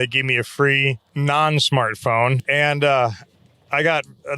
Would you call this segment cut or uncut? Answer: cut